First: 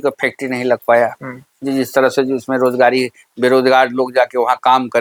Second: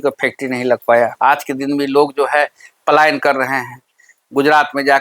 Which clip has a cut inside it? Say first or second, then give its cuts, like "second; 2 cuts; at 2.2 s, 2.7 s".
second; 1 cut; at 1.1 s